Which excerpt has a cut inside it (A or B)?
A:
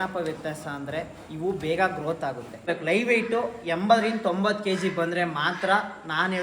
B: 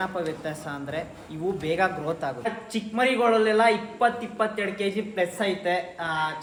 A